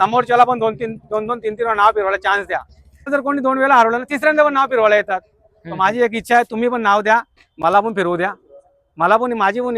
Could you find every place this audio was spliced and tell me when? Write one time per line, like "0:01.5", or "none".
0:03.1